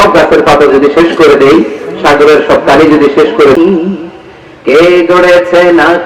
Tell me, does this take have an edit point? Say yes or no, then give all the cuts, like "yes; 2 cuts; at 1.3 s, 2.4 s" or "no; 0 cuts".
yes; 1 cut; at 3.6 s